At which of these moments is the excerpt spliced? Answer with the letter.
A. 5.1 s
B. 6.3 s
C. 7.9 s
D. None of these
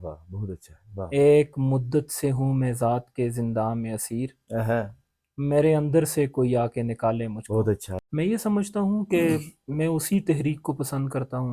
C